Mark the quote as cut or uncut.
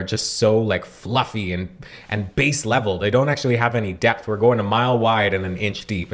uncut